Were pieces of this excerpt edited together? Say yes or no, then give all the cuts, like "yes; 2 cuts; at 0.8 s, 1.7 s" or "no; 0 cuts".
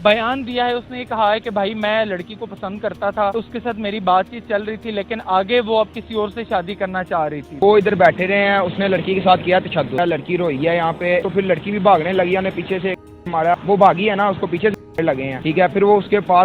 yes; 6 cuts; at 3.3 s, 7.5 s, 10.0 s, 11.3 s, 13.6 s, 15.3 s